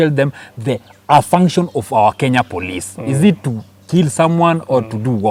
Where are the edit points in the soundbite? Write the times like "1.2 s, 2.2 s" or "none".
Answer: none